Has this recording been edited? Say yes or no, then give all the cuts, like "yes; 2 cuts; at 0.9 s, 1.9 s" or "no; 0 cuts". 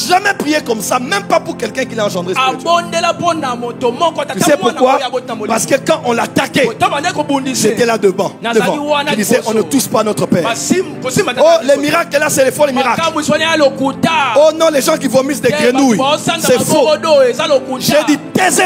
no; 0 cuts